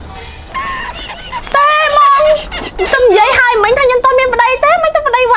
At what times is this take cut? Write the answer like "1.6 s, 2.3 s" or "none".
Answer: none